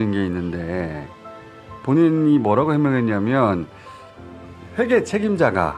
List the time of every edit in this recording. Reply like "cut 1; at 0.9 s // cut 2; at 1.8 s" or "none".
cut 1; at 1.7 s